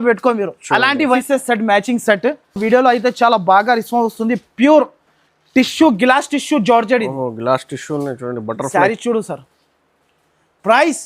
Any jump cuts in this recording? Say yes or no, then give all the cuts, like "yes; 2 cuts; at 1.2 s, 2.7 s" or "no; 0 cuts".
yes; 1 cut; at 1.2 s